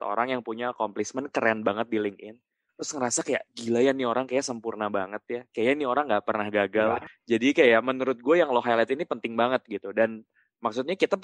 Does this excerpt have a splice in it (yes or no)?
yes